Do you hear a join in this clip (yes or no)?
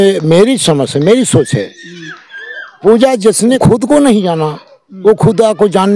yes